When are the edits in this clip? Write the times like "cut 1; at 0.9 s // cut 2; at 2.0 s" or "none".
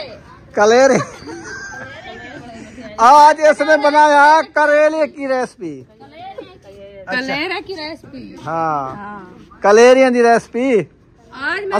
cut 1; at 2.3 s